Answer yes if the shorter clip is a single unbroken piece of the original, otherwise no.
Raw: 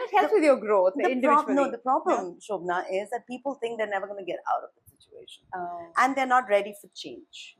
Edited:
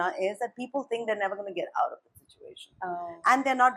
yes